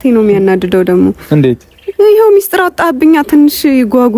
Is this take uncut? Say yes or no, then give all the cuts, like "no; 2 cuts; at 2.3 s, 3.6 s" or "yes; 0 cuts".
yes; 0 cuts